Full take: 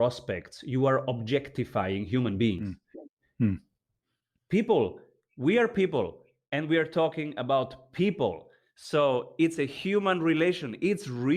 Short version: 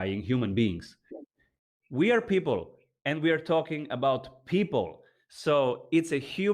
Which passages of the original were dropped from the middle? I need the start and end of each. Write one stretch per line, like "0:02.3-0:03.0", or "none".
0:03.3-0:04.9